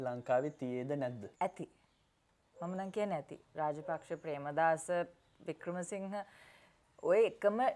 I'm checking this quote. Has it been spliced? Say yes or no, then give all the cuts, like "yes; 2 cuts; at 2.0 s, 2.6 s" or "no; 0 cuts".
yes; 1 cut; at 1.2 s